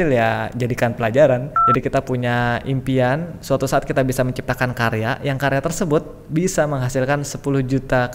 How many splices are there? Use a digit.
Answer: 1